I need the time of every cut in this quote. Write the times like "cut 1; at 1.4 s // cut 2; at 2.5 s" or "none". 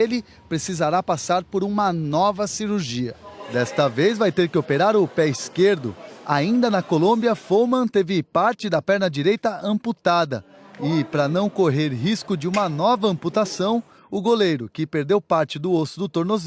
cut 1; at 2.6 s